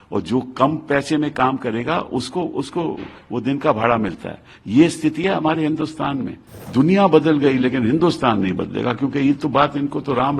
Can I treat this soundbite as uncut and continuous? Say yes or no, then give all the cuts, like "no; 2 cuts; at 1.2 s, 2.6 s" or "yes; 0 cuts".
no; 1 cut; at 6.6 s